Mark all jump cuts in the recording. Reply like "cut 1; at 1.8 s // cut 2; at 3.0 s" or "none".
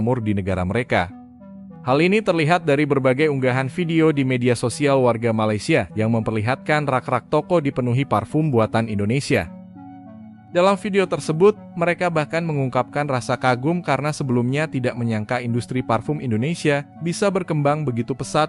none